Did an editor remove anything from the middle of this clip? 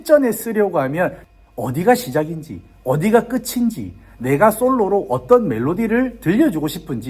yes; 1 cut; at 1.2 s

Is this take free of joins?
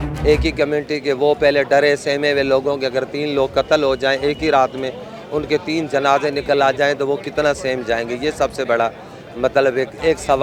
yes; 0 cuts

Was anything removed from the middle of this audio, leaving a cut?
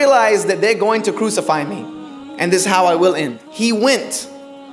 yes; 1 cut; at 3.4 s

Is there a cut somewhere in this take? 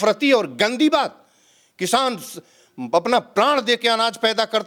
no; 0 cuts

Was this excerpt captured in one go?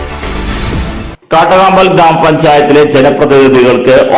no; 1 cut; at 1.1 s

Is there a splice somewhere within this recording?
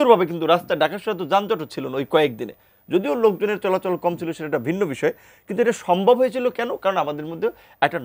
no; 0 cuts

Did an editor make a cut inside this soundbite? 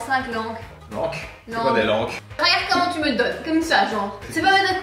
yes; 1 cut; at 2.2 s

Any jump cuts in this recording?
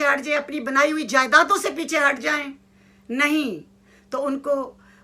no; 0 cuts

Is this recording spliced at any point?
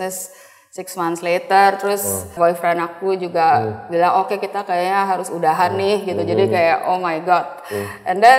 yes; 1 cut; at 2.3 s

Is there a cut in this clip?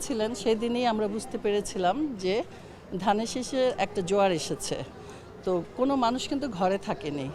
no; 0 cuts

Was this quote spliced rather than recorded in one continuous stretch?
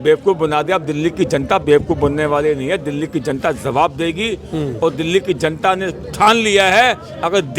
no; 0 cuts

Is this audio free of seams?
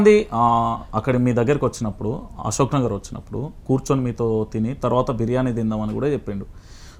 yes; 0 cuts

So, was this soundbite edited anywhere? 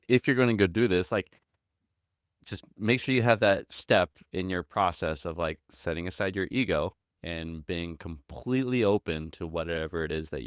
no; 0 cuts

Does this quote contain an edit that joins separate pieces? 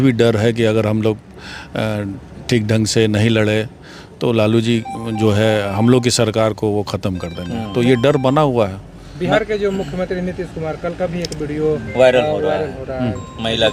no; 0 cuts

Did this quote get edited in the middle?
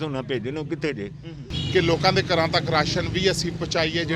yes; 1 cut; at 1.5 s

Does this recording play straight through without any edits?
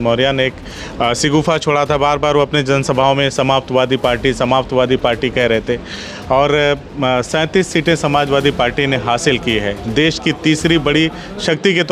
yes; 0 cuts

